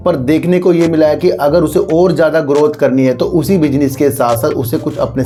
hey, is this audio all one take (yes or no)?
yes